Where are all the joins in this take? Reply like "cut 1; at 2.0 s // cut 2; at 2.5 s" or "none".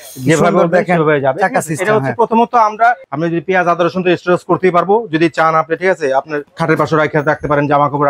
cut 1; at 3.1 s // cut 2; at 6.5 s